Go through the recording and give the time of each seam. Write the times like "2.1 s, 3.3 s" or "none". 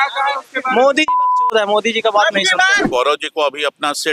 2.8 s

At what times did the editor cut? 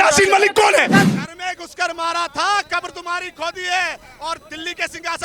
1.1 s

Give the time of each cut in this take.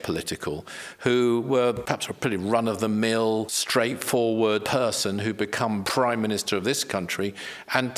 1.8 s, 3.6 s, 4.6 s, 5.9 s

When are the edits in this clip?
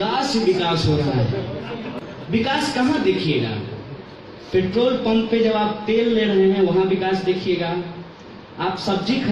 2.0 s

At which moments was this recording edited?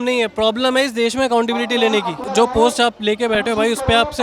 2.2 s

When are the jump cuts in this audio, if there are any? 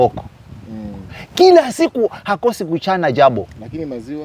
none

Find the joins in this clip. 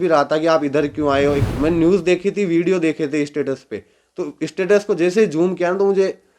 1.4 s

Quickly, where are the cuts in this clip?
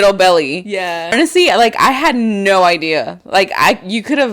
1.1 s

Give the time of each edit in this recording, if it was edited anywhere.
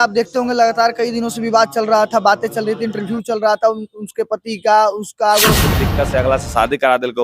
5.7 s

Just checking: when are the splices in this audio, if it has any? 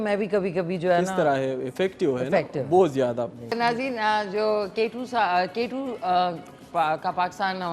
3.5 s

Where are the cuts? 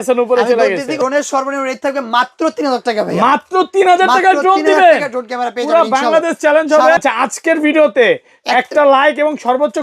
1.0 s, 7.0 s

